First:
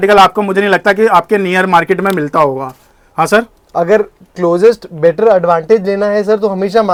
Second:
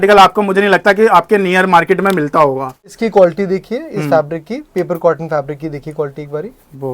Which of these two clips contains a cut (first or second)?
second